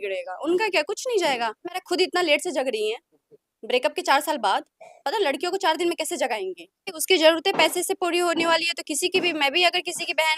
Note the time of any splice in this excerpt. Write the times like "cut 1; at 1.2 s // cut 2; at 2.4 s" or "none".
cut 1; at 1.8 s // cut 2; at 7.0 s